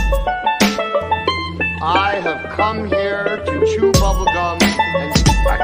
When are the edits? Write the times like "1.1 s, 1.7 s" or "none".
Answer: 1.2 s

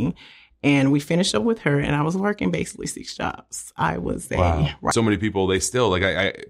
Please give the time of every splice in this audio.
4.9 s

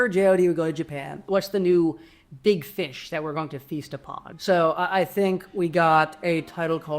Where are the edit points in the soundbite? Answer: 1.1 s

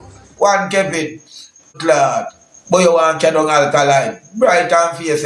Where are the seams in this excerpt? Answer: 1.7 s

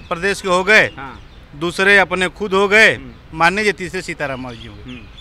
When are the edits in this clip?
none

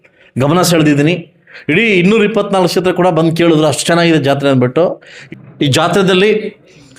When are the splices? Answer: 5.2 s

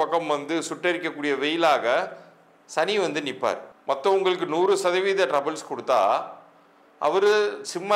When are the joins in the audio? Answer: 3.7 s

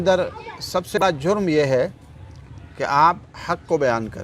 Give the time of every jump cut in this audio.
1.0 s

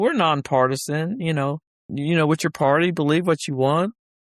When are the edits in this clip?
1.7 s

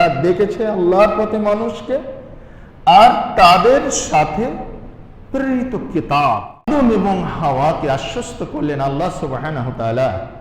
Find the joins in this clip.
6.7 s

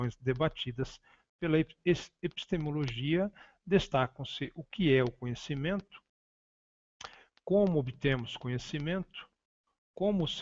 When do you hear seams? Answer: 2.5 s

